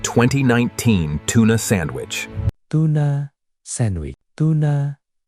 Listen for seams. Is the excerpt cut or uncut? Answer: uncut